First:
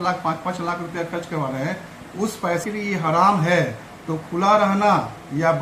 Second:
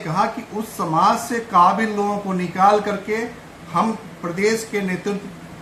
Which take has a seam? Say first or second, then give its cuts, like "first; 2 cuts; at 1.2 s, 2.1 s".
first; 1 cut; at 2.6 s